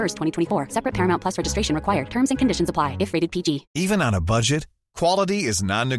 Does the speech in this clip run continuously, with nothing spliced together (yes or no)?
no